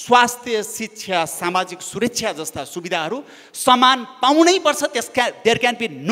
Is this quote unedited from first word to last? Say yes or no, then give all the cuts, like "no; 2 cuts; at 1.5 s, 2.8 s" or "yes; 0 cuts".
yes; 0 cuts